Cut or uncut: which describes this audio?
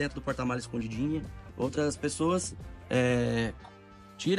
cut